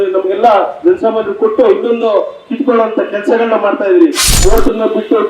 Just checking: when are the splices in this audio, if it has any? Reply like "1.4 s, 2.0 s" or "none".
4.3 s